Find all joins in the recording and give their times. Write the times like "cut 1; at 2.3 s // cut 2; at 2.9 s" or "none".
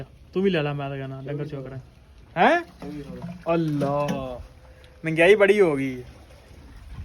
none